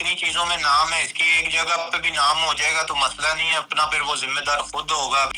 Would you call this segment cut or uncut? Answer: uncut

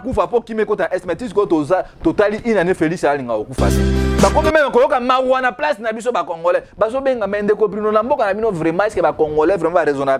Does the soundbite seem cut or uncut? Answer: cut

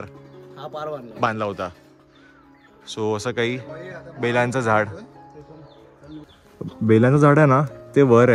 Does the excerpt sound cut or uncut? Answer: uncut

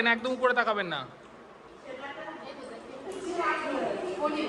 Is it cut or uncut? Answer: uncut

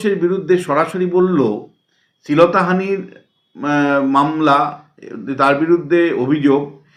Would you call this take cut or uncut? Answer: uncut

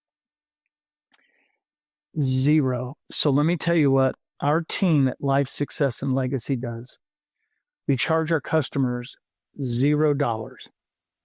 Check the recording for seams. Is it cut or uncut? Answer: cut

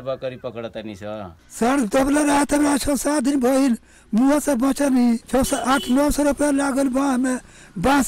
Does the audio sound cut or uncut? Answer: cut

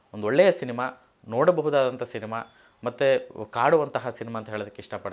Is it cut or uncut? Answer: uncut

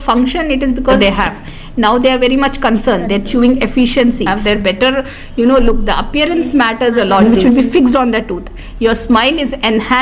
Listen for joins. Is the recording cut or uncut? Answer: cut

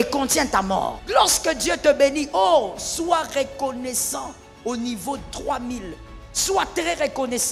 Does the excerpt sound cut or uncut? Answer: cut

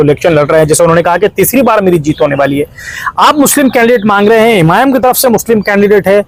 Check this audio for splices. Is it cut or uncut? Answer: uncut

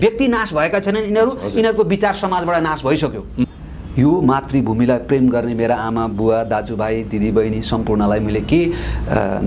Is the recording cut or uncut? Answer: cut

